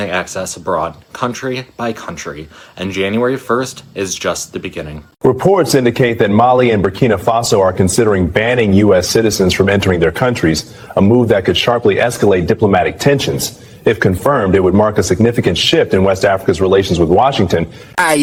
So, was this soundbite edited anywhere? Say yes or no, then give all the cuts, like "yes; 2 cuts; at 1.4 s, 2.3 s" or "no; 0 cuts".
no; 0 cuts